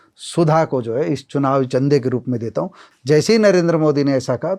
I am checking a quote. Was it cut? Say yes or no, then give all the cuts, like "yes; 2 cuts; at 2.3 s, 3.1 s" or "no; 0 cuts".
yes; 1 cut; at 2.8 s